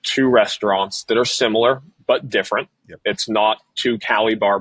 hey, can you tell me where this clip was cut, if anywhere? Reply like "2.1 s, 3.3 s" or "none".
none